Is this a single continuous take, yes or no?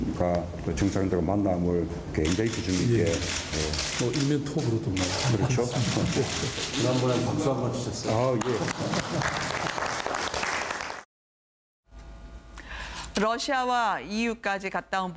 no